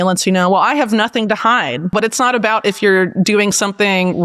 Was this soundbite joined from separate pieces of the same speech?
yes; 1 cut; at 1.9 s

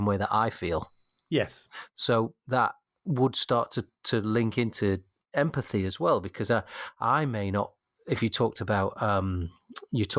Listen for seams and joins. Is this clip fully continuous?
yes; 0 cuts

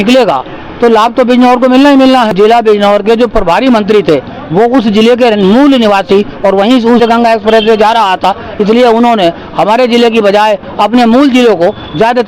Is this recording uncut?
no; 2 cuts; at 2.3 s, 7.0 s

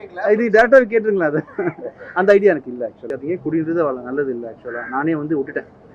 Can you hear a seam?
yes; 1 cut; at 3.0 s

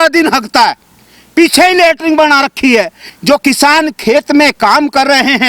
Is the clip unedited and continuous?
no; 1 cut; at 3.0 s

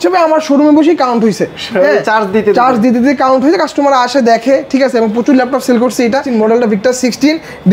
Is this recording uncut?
no; 1 cut; at 6.3 s

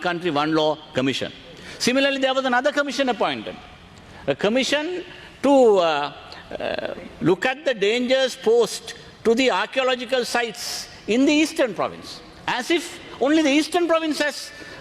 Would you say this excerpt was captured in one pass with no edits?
yes; 0 cuts

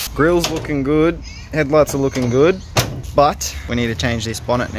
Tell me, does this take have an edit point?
yes; 2 cuts; at 3.0 s, 3.5 s

